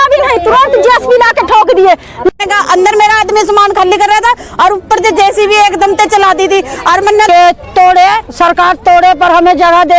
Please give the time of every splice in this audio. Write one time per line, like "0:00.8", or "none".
0:02.3
0:07.3